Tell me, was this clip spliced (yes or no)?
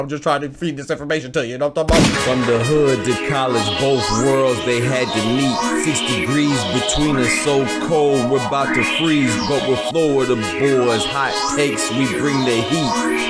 yes